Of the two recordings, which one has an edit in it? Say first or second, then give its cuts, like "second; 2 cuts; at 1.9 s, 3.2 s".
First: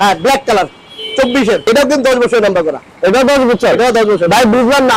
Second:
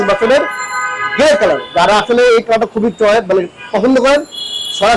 first; 1 cut; at 1.6 s